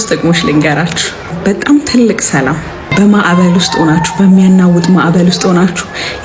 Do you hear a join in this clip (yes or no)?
yes